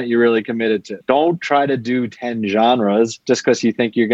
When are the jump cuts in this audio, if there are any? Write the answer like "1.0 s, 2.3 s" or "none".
1.0 s, 3.2 s